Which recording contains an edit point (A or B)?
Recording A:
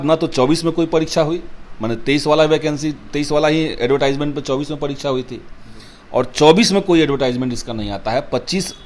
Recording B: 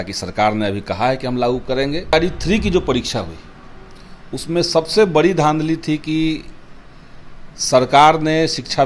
B